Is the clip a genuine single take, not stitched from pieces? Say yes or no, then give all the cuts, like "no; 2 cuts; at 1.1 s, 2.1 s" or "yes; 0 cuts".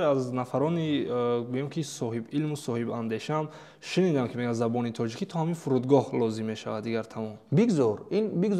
yes; 0 cuts